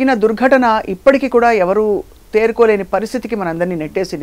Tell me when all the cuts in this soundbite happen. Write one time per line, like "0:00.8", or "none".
none